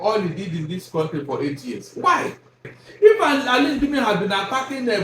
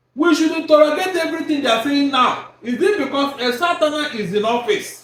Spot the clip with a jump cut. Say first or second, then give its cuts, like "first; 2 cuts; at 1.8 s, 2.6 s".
first; 1 cut; at 2.8 s